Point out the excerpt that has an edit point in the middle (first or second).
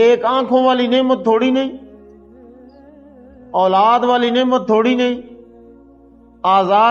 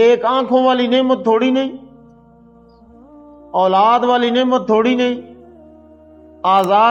first